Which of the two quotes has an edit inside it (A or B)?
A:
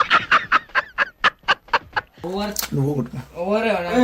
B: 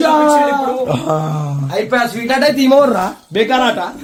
A